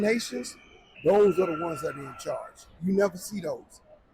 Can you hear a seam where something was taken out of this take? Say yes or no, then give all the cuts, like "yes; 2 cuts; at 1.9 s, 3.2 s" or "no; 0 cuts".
yes; 2 cuts; at 0.9 s, 2.8 s